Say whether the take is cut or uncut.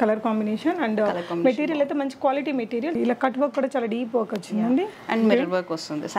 cut